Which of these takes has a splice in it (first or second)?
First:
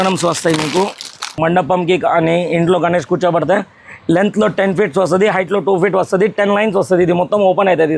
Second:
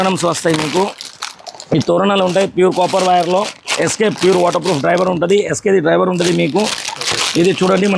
first